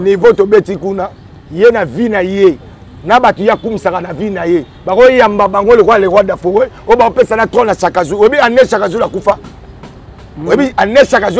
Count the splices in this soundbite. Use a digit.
0